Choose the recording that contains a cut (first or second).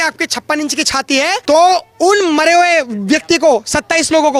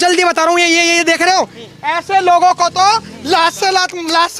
first